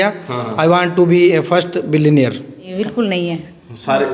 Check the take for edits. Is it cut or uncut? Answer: cut